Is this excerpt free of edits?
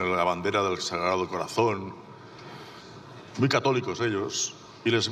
yes; 0 cuts

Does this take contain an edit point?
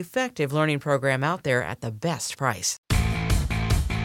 yes; 1 cut; at 2.7 s

